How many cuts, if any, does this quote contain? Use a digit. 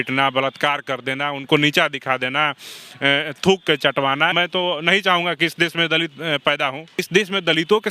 2